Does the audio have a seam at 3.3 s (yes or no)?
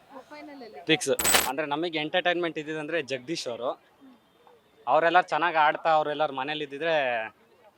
no